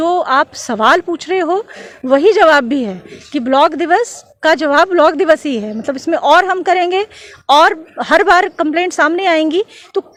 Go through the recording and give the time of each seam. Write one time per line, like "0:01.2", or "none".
none